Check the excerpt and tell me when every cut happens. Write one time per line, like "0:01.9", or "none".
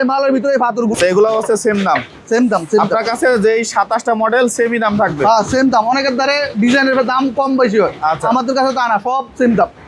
0:00.9

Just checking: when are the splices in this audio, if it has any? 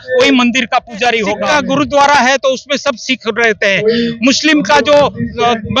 0:01.4

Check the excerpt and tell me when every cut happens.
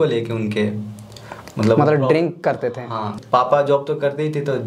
0:03.2

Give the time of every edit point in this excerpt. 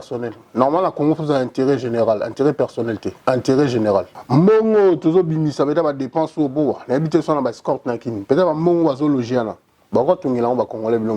0:04.2

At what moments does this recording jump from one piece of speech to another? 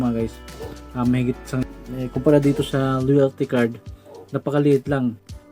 0:01.6

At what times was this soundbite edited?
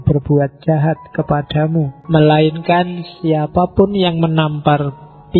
0:02.0

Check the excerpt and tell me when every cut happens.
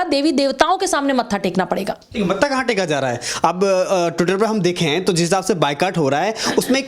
none

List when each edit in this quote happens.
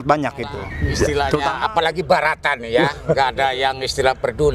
0:01.1

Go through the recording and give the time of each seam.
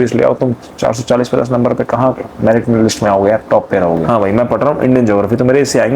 0:04.1

